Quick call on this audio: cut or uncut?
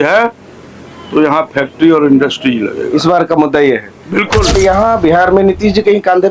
cut